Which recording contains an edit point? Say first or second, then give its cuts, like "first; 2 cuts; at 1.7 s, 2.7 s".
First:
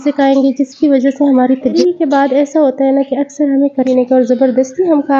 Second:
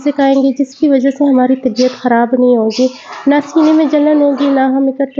first; 2 cuts; at 1.8 s, 3.9 s